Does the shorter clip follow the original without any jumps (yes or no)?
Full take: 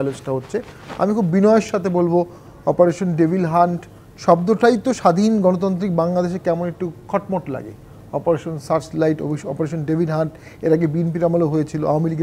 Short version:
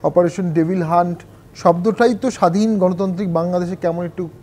yes